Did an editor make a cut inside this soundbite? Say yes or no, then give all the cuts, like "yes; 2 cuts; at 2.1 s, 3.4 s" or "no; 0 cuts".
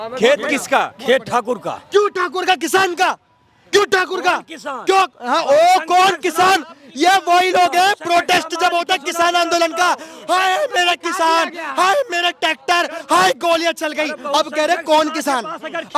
no; 0 cuts